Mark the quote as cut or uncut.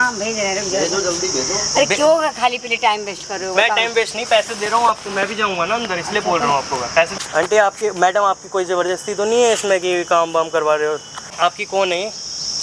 cut